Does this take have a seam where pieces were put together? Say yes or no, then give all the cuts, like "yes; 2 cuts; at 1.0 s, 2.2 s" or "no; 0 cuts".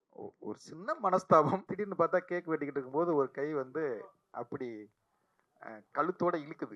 yes; 1 cut; at 1.7 s